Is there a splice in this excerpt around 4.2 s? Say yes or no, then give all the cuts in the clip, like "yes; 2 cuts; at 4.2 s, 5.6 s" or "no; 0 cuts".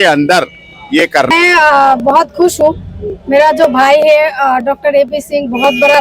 no; 1 cut; at 1.3 s